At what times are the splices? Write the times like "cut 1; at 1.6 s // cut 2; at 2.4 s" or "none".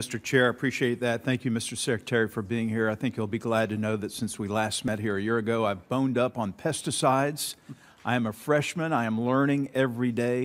cut 1; at 3.7 s // cut 2; at 8.8 s